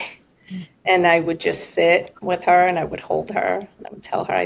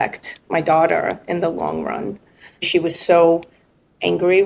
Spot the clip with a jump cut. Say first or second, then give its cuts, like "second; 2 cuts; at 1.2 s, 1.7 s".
second; 1 cut; at 2.7 s